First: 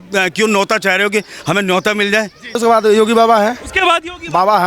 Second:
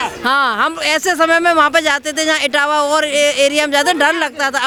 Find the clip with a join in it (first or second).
first